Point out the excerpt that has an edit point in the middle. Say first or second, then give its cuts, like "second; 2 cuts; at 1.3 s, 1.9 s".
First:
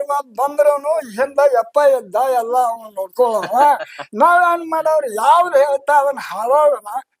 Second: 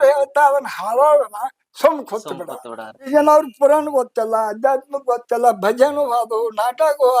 second; 1 cut; at 2.9 s